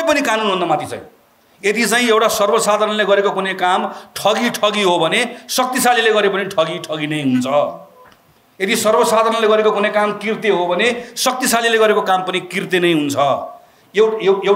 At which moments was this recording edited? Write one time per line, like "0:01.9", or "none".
none